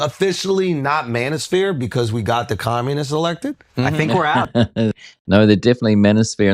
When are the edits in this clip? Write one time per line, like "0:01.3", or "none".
none